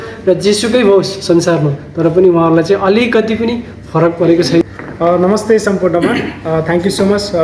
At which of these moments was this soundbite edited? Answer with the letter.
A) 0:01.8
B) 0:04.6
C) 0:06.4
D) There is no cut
B